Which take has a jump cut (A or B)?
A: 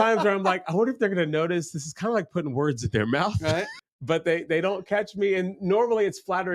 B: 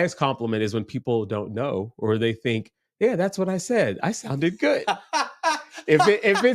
A